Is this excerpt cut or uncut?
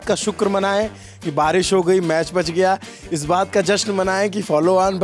uncut